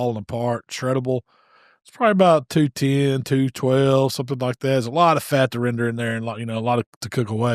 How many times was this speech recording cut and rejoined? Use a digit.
0